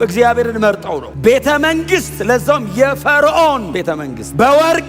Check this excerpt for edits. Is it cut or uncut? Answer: cut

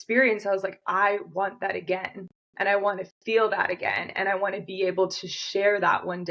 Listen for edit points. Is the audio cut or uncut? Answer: uncut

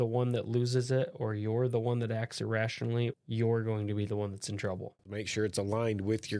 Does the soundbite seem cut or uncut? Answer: cut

